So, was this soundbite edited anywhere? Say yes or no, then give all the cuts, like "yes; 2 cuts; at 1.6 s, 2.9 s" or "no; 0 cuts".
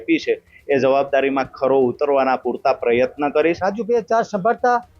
yes; 1 cut; at 3.6 s